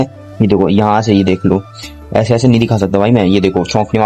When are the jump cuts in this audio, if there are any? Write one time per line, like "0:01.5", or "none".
none